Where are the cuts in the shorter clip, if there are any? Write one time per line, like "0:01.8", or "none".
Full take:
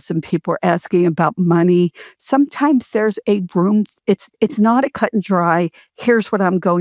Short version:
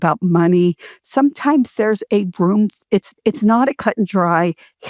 none